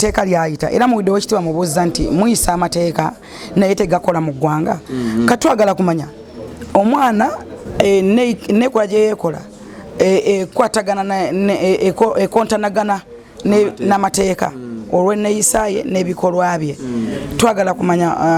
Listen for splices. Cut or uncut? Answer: uncut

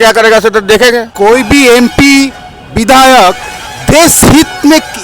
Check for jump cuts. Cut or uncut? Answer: cut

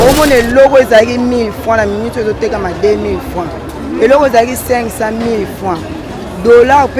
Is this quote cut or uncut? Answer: uncut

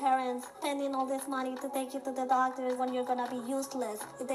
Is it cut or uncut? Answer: uncut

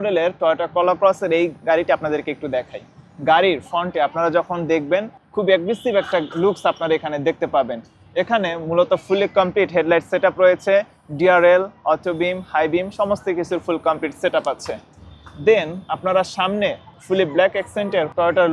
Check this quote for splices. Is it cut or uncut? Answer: uncut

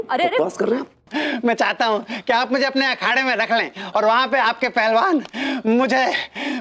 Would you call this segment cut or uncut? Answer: cut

